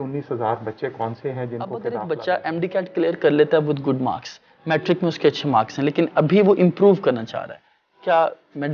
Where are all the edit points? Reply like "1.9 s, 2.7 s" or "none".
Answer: 1.9 s